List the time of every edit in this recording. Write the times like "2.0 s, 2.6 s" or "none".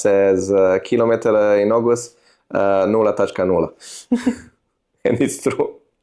none